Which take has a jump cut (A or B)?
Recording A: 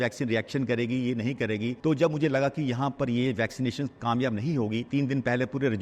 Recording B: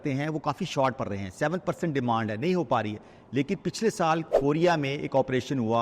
A